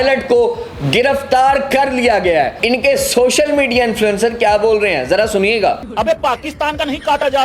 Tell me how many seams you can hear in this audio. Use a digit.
2